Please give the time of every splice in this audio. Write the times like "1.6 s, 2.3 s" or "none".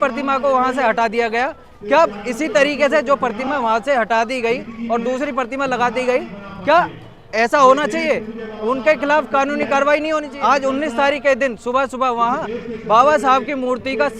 10.3 s